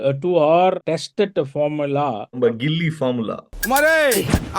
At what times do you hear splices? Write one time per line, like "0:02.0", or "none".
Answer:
0:00.8
0:02.4